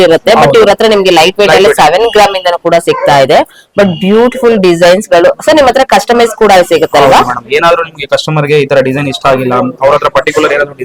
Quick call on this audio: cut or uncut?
uncut